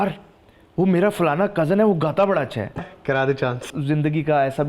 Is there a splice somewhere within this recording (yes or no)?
yes